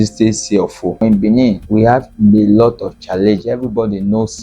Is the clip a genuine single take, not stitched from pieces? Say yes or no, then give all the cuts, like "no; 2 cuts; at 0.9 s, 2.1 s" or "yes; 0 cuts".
no; 1 cut; at 1.0 s